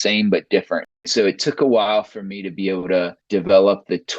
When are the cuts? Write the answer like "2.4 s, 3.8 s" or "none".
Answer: 1.0 s, 3.2 s

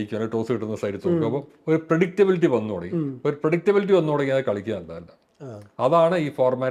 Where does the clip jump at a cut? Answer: none

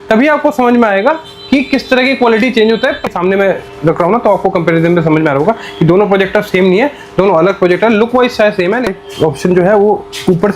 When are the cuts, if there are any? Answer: 3.0 s, 8.9 s

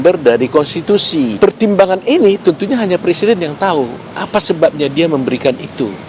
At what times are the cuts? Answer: 1.3 s

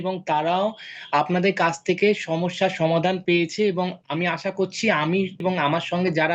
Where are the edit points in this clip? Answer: 5.4 s

